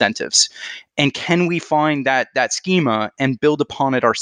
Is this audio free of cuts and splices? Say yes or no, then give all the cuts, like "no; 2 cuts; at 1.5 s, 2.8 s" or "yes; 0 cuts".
yes; 0 cuts